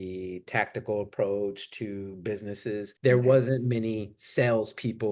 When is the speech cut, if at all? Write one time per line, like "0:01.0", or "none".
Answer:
0:02.9